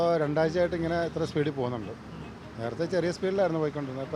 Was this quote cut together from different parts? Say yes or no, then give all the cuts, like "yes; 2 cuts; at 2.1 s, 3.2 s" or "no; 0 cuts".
no; 0 cuts